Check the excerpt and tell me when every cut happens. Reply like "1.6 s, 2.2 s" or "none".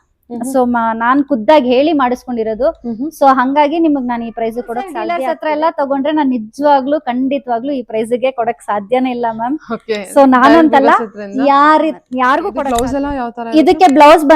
5.2 s, 12.5 s